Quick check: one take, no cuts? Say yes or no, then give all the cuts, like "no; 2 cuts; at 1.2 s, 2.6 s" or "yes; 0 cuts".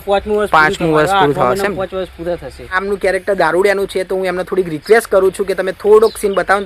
no; 1 cut; at 2.7 s